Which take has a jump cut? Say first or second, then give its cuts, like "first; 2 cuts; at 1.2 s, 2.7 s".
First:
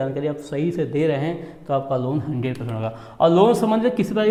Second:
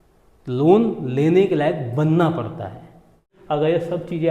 second; 1 cut; at 3.3 s